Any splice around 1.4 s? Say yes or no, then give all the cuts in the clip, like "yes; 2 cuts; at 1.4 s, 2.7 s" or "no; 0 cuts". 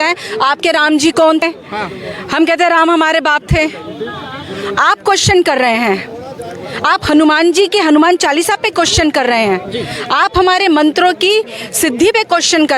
yes; 1 cut; at 1.4 s